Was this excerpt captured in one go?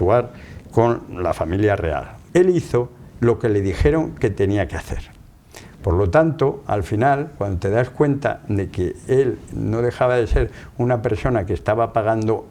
no; 1 cut; at 2.1 s

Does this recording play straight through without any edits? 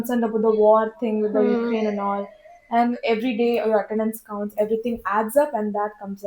no; 1 cut; at 3.0 s

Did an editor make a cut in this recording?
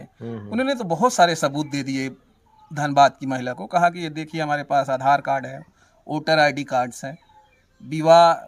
no; 0 cuts

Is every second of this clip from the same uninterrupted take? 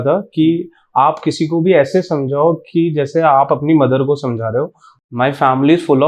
no; 1 cut; at 4.8 s

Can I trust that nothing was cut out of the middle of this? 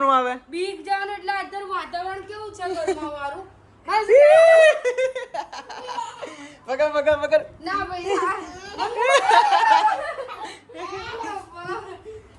yes; 0 cuts

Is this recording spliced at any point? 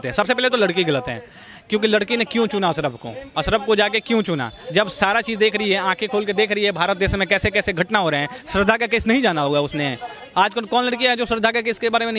no; 0 cuts

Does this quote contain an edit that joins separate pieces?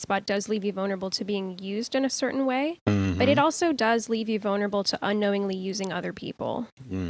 no; 0 cuts

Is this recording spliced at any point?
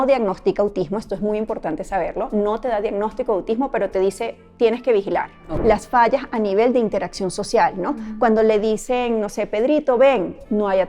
yes; 1 cut; at 5.4 s

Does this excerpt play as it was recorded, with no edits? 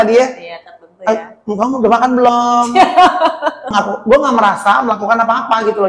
no; 1 cut; at 3.7 s

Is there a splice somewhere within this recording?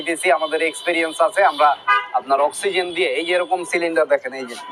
no; 0 cuts

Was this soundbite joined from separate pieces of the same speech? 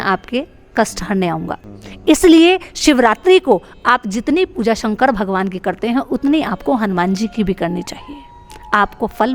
no; 0 cuts

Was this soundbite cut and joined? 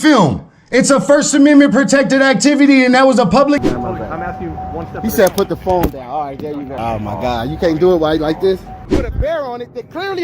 yes; 3 cuts; at 3.6 s, 6.7 s, 8.8 s

